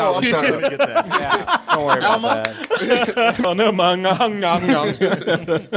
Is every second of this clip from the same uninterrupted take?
no; 1 cut; at 3.4 s

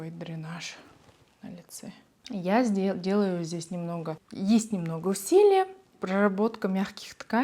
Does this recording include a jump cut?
yes; 3 cuts; at 2.1 s, 4.2 s, 5.9 s

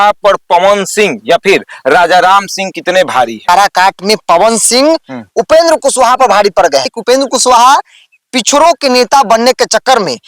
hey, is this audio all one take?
no; 2 cuts; at 3.4 s, 6.9 s

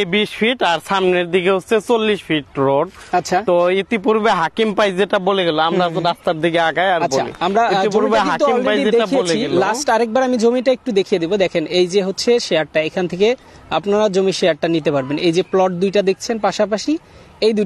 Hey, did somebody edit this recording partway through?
no; 0 cuts

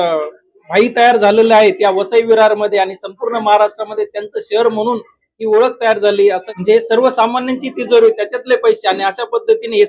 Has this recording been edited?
yes; 1 cut; at 6.5 s

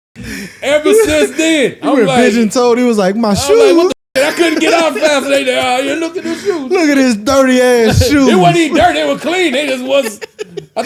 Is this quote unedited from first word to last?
yes; 0 cuts

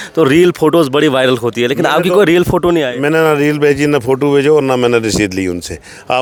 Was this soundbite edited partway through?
no; 0 cuts

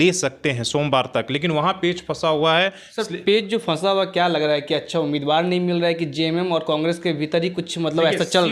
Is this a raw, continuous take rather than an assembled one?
yes; 0 cuts

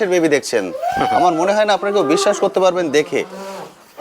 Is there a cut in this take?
no; 0 cuts

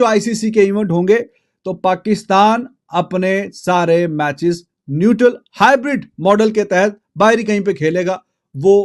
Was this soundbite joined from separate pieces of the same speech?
no; 0 cuts

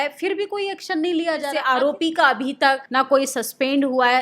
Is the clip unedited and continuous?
no; 2 cuts; at 1.6 s, 2.8 s

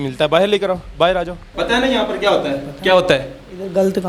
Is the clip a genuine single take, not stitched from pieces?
no; 1 cut; at 1.5 s

